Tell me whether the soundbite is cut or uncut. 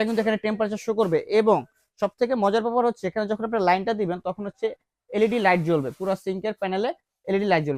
uncut